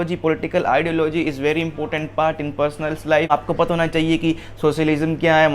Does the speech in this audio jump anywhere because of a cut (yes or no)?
yes